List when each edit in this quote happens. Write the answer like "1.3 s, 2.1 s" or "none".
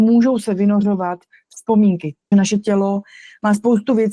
2.3 s